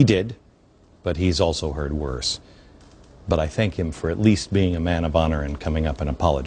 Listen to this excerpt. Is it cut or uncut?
uncut